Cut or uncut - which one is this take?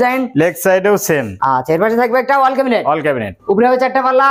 cut